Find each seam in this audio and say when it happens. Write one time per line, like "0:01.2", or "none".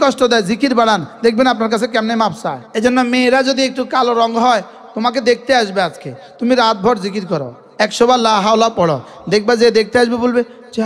0:02.6